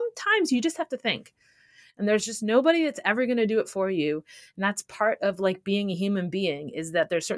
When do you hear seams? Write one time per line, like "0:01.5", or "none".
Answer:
none